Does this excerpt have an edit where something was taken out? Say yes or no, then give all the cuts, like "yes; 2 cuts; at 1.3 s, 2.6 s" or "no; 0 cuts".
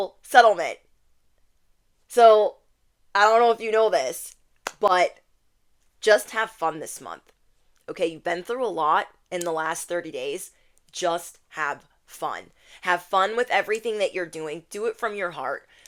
no; 0 cuts